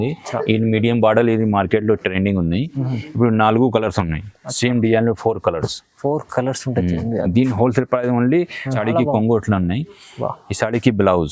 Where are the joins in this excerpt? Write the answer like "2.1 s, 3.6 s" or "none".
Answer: 8.6 s

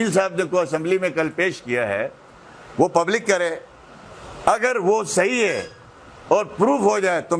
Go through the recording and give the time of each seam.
none

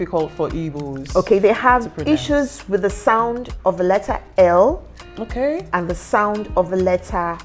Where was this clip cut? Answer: none

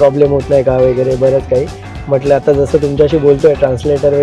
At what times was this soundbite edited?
none

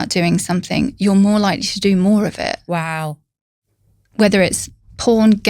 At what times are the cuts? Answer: none

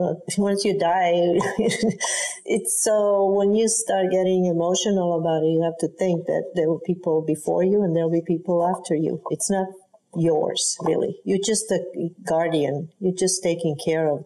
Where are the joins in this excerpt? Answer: 2.3 s

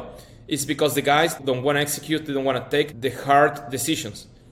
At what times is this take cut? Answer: 1.4 s, 2.9 s

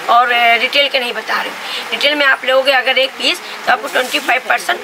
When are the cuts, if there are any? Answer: none

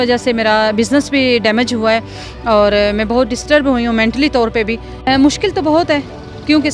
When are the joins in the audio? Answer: none

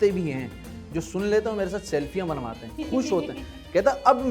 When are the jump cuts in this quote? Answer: none

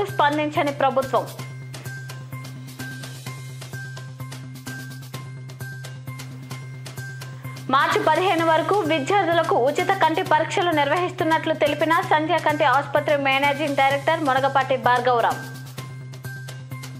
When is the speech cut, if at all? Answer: 1.3 s

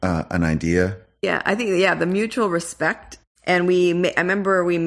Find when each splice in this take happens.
1.2 s, 3.1 s

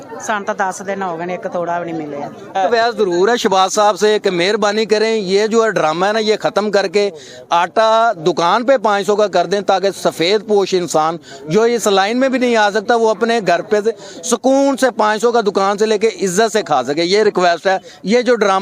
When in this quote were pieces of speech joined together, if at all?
2.5 s

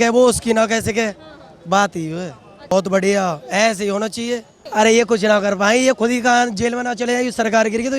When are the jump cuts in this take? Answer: 2.7 s, 4.5 s

